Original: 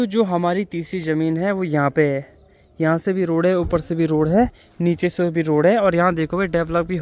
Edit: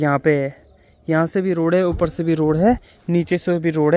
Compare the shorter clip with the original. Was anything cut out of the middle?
no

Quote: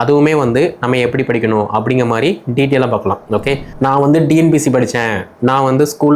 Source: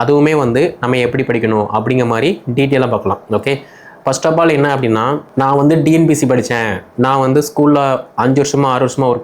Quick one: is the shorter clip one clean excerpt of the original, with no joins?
no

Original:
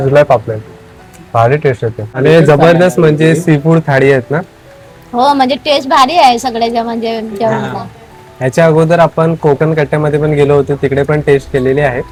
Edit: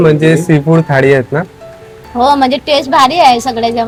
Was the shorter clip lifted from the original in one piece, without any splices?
yes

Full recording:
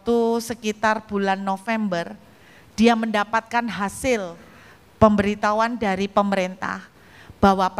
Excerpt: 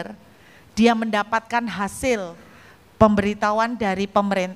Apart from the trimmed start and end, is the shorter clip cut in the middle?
no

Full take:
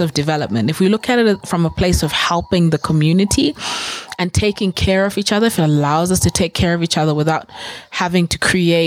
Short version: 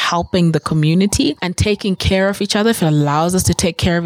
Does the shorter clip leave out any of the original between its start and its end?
yes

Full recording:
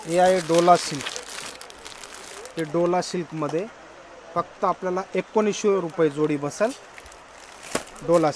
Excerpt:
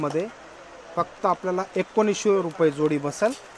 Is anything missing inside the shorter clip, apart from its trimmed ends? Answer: no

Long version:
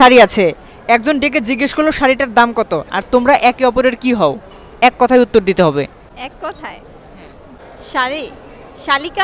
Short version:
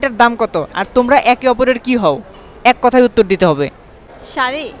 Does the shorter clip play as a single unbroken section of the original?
no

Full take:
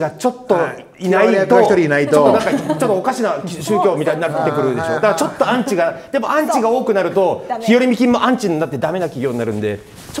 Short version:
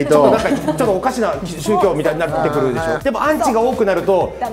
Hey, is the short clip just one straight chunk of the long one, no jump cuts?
no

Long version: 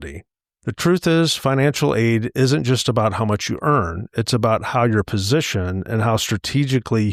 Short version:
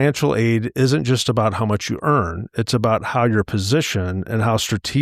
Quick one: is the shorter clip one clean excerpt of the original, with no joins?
yes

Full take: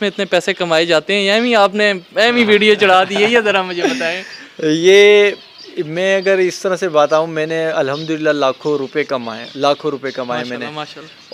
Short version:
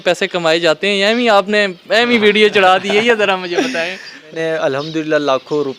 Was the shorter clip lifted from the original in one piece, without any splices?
no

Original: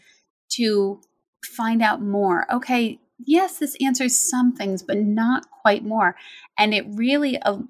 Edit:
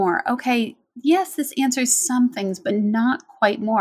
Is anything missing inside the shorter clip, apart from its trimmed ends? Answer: no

